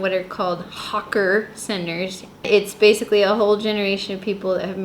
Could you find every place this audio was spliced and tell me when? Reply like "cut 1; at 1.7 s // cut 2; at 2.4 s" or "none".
cut 1; at 2.4 s